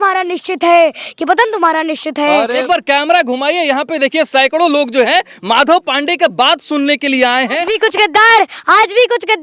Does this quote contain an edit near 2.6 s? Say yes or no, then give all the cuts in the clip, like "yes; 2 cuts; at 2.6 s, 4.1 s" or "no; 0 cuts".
yes; 2 cuts; at 2.6 s, 7.8 s